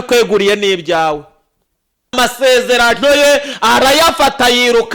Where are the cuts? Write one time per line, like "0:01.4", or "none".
0:02.1